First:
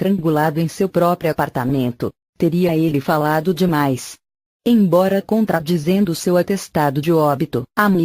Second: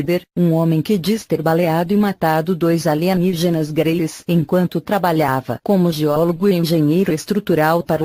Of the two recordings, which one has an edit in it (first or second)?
first